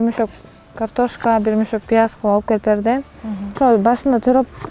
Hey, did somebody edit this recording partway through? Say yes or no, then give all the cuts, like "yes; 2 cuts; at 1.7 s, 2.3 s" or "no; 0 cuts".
yes; 1 cut; at 3.6 s